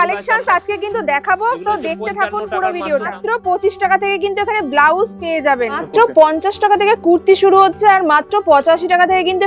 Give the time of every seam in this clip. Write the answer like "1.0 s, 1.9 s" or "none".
3.2 s, 5.8 s